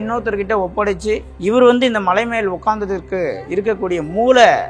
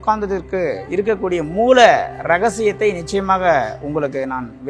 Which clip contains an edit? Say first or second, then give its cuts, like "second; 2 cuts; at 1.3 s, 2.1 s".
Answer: first; 1 cut; at 1.3 s